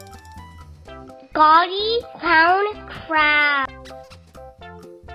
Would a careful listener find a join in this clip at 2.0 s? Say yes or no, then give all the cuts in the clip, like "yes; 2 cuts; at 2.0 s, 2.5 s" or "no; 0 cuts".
no; 0 cuts